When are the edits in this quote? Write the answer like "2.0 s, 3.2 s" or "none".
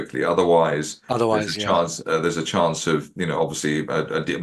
3.1 s